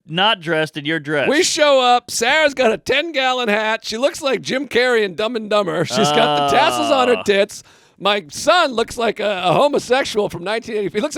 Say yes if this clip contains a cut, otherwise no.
no